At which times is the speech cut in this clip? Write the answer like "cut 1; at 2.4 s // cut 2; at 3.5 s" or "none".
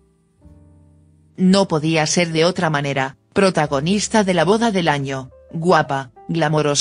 cut 1; at 1.8 s